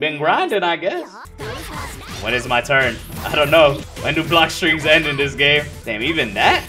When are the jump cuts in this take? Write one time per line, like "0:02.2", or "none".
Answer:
0:01.2
0:03.9
0:05.8